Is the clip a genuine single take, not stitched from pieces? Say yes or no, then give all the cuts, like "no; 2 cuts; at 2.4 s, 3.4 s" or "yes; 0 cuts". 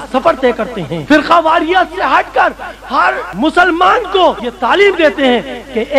no; 3 cuts; at 0.9 s, 3.3 s, 4.5 s